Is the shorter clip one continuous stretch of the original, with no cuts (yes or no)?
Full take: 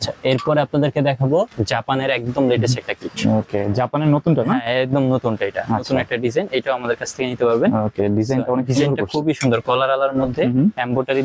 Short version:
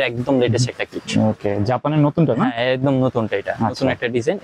yes